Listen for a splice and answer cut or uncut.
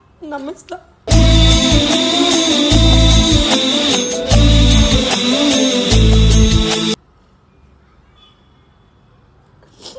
uncut